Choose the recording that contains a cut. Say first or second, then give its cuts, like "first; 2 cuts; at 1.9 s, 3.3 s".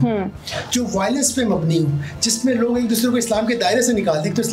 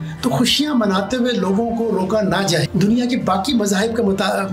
second; 1 cut; at 2.7 s